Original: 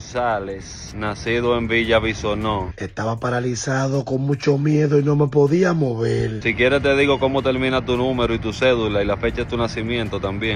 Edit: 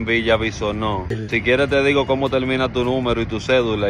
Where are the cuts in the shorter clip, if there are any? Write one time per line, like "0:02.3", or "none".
0:01.2